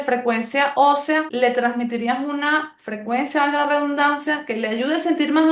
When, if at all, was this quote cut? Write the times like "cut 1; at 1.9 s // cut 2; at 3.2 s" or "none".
cut 1; at 1.3 s